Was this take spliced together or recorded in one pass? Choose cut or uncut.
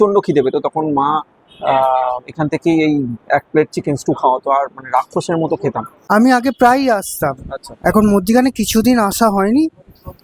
cut